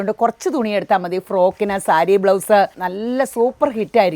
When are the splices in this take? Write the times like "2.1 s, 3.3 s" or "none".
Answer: 2.8 s